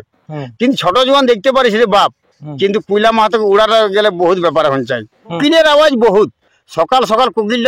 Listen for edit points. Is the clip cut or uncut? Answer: cut